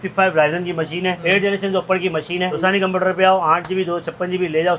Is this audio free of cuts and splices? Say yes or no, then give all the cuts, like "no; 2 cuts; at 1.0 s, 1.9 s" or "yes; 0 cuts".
no; 2 cuts; at 1.2 s, 2.6 s